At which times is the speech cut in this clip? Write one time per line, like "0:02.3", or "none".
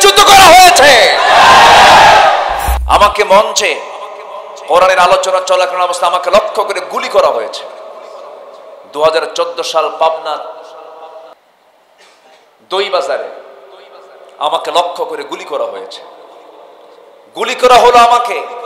0:02.7